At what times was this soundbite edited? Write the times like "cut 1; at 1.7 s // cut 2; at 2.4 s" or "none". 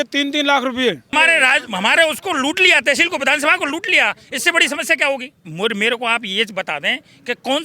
cut 1; at 1.0 s // cut 2; at 5.5 s